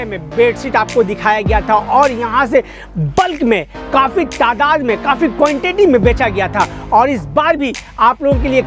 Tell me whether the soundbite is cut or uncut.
uncut